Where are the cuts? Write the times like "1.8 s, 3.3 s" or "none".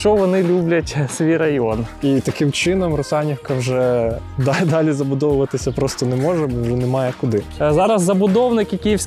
1.9 s, 7.4 s